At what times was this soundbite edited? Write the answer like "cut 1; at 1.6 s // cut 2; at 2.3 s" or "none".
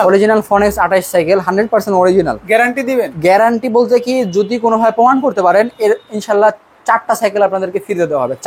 none